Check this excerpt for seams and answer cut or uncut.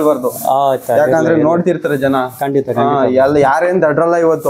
uncut